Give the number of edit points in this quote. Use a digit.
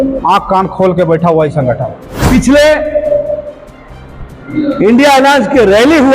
1